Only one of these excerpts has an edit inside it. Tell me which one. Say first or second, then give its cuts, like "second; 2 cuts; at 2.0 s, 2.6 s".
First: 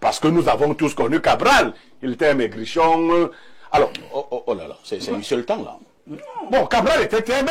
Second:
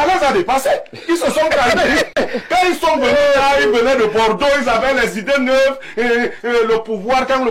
second; 1 cut; at 2.1 s